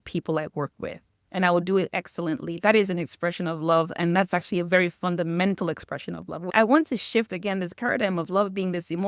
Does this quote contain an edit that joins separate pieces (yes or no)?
yes